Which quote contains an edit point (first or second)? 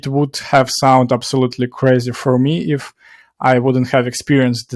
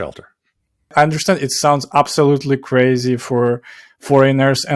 second